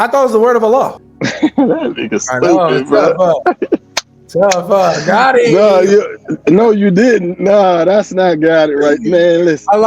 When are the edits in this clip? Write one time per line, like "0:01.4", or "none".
0:01.0